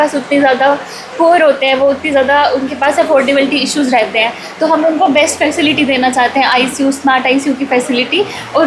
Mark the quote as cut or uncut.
uncut